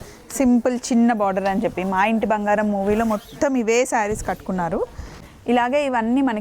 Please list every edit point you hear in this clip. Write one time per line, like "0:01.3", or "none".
0:05.2